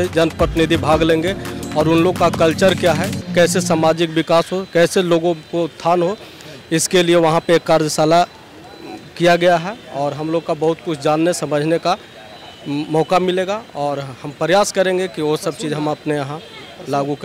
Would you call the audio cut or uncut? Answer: uncut